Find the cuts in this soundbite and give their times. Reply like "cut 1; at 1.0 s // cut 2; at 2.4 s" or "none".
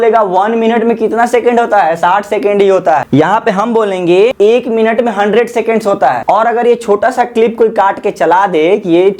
cut 1; at 3.1 s // cut 2; at 4.3 s // cut 3; at 6.2 s